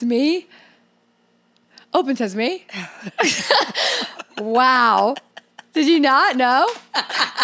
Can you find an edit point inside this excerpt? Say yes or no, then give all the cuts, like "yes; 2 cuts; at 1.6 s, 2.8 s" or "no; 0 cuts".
no; 0 cuts